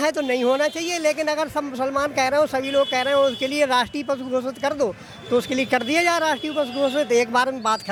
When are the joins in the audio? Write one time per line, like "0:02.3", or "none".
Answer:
none